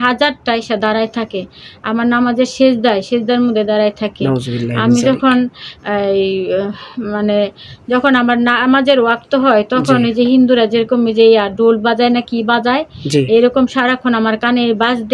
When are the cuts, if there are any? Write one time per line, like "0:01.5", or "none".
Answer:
none